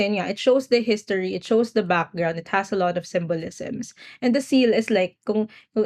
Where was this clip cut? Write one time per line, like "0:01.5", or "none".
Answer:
none